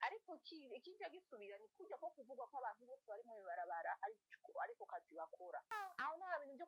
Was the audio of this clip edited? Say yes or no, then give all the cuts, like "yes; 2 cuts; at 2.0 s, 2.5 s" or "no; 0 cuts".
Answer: yes; 1 cut; at 5.7 s